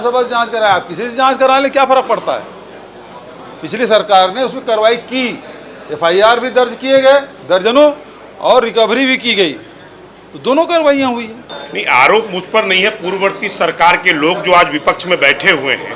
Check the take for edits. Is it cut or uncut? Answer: uncut